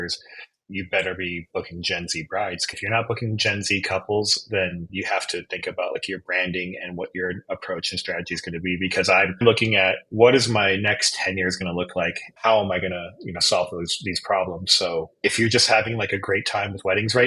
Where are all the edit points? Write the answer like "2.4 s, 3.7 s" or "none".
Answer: 2.8 s, 9.4 s, 12.3 s